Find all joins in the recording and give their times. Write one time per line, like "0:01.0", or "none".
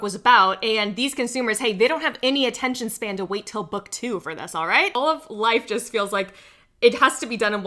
0:04.9